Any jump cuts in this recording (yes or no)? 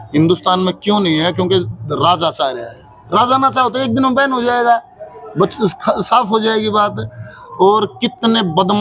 no